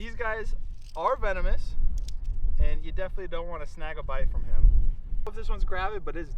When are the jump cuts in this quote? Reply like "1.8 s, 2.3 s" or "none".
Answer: 5.3 s